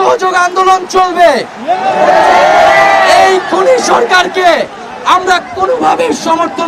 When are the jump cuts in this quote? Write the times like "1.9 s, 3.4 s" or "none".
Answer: none

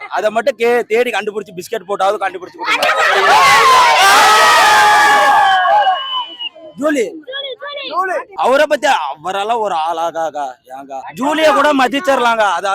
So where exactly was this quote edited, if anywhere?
none

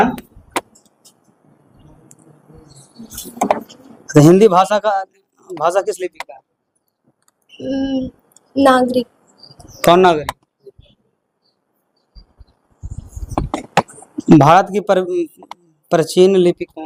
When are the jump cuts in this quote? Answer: none

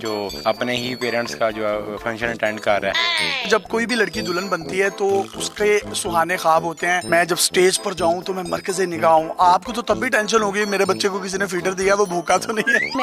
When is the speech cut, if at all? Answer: 3.0 s

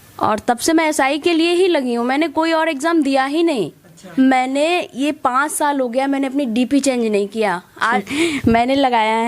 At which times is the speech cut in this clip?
4.0 s, 8.0 s

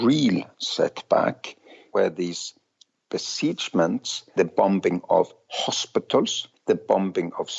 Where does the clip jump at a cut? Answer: none

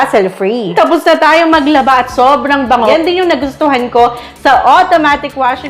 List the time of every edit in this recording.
0.7 s, 2.9 s

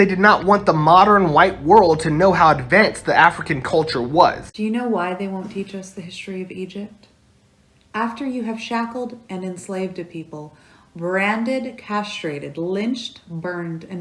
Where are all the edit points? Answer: 4.5 s

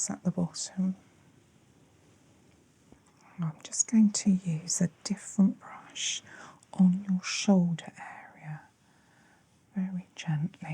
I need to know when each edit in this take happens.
3.0 s

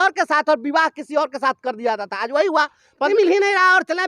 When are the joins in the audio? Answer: 3.1 s

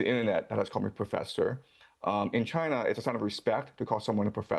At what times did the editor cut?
none

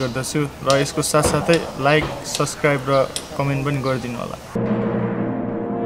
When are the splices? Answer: 4.6 s

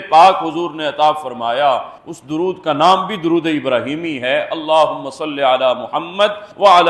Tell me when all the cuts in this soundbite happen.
none

